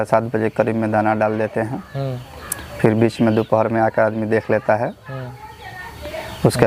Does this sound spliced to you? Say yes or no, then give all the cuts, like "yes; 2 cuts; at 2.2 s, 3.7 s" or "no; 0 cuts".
no; 0 cuts